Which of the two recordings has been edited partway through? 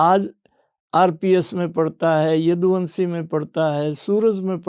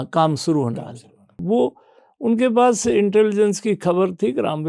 second; 1 cut; at 1.3 s

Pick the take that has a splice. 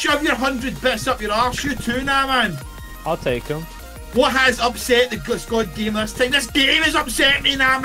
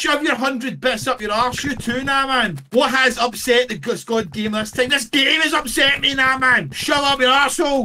second; 2 cuts; at 2.6 s, 6.7 s

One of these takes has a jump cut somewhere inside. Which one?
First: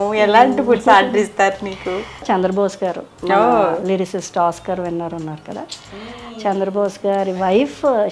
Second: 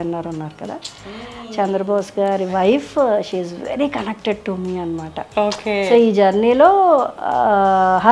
first; 1 cut; at 2.2 s

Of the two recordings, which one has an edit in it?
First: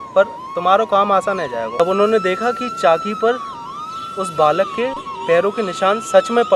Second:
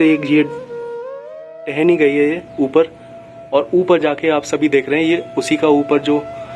first; 1 cut; at 1.7 s

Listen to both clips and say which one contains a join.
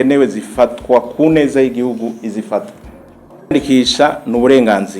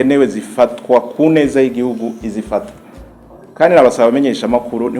first; 1 cut; at 3.3 s

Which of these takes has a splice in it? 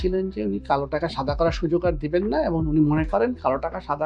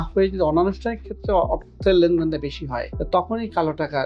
second; 1 cut; at 2.9 s

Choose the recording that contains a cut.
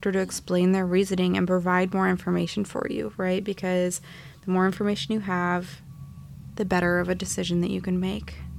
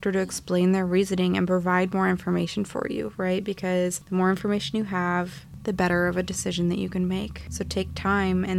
second; 3 cuts; at 4.0 s, 5.4 s, 7.4 s

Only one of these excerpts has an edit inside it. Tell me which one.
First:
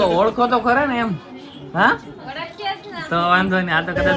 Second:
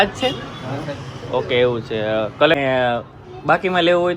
second; 1 cut; at 2.5 s

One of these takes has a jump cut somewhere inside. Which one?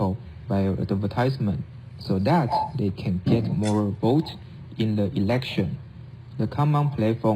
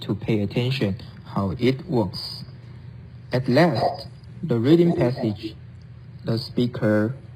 first; 1 cut; at 4.6 s

